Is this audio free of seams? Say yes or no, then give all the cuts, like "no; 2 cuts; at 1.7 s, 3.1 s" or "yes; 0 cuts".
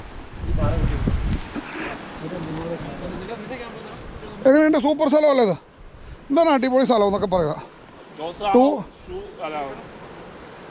yes; 0 cuts